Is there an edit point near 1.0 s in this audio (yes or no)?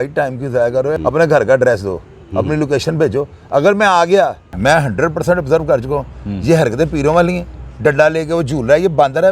yes